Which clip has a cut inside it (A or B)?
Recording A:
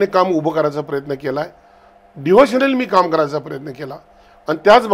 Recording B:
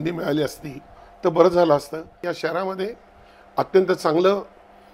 B